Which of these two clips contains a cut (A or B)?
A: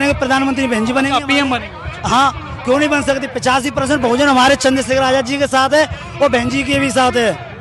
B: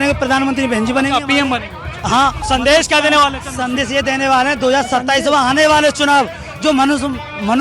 B